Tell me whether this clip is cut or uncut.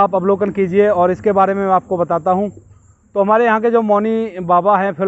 uncut